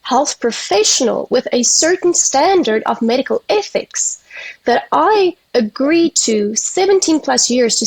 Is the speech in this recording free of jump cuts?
yes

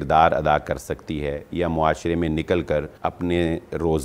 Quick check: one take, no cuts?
no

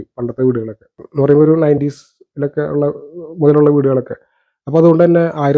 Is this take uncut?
no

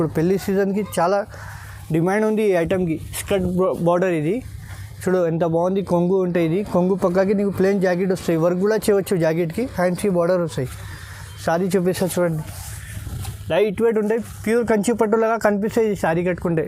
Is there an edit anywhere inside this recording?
no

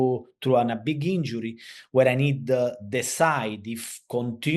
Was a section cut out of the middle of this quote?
no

